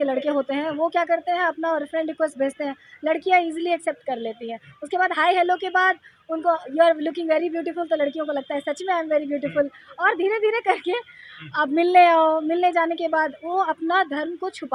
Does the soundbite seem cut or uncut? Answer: uncut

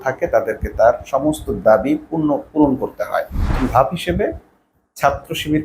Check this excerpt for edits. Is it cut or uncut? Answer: cut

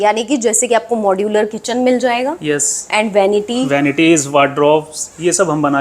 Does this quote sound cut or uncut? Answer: uncut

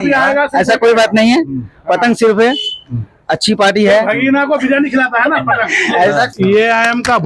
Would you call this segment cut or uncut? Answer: cut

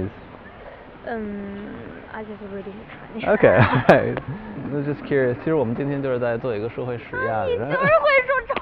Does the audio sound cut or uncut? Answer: cut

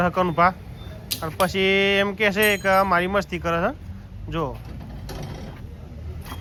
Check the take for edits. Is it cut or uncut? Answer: uncut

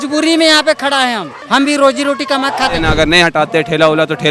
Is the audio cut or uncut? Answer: cut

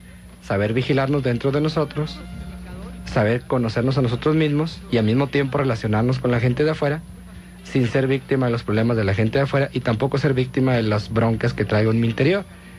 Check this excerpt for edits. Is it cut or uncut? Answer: uncut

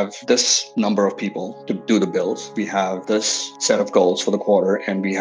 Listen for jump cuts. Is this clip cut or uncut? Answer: uncut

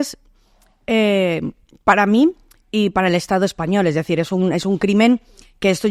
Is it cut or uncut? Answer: uncut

